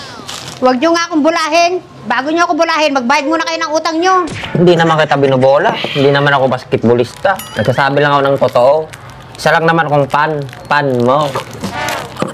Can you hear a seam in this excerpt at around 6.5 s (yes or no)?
no